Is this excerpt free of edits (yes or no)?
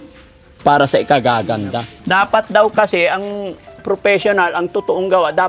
no